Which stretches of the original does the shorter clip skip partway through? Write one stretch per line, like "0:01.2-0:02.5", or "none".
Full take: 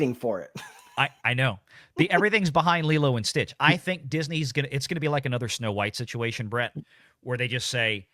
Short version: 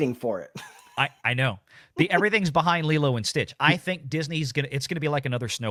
none